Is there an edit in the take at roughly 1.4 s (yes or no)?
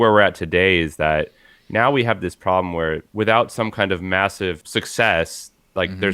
no